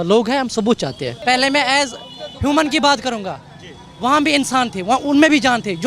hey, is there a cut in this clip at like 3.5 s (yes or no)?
no